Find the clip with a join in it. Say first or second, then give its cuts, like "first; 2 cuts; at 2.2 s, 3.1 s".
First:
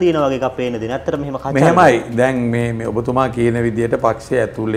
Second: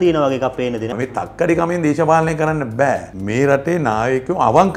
second; 2 cuts; at 1.0 s, 3.1 s